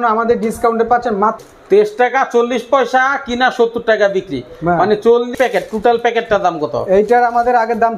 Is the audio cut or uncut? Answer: cut